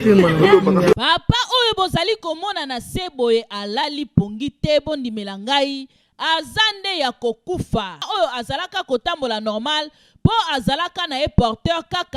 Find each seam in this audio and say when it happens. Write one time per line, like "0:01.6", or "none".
0:08.1